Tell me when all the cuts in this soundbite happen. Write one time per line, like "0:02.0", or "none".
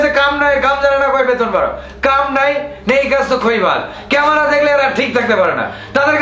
none